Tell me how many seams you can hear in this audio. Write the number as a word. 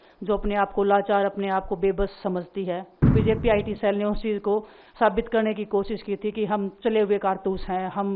one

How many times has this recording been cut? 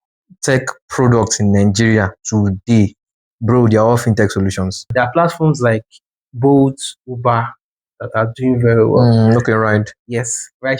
one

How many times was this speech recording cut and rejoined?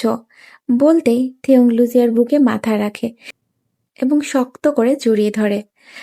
one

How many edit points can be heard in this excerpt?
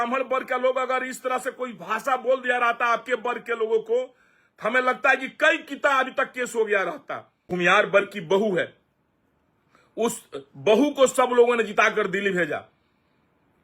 one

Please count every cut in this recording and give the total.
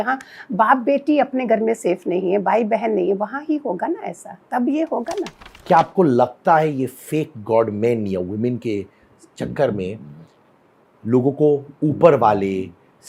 one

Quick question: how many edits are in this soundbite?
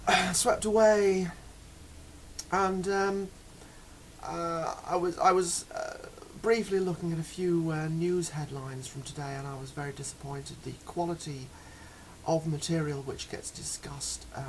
one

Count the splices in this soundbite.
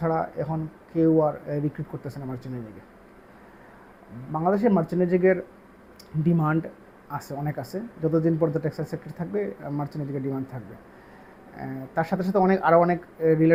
zero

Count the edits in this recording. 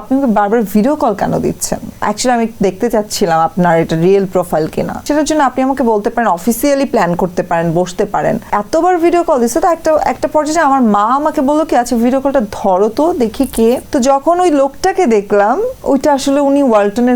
four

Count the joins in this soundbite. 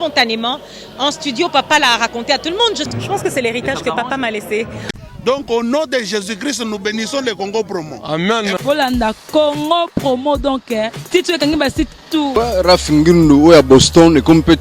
three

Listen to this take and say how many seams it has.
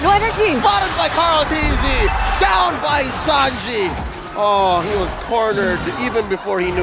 zero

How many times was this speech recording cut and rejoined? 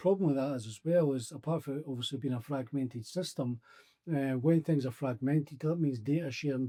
zero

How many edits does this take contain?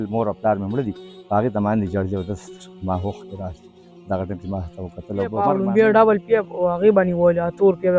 one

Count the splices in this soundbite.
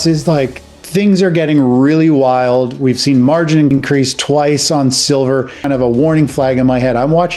two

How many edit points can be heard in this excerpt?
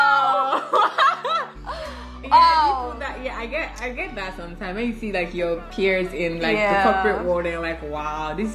zero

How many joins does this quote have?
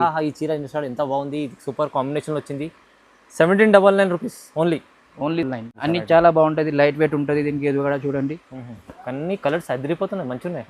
one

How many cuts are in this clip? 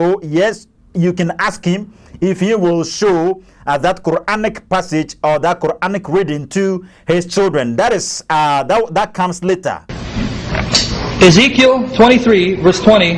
one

